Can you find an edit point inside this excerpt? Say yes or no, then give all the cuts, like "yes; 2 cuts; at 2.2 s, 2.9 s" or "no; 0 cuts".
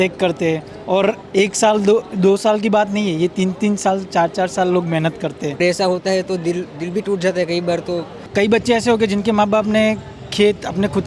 yes; 2 cuts; at 5.6 s, 8.2 s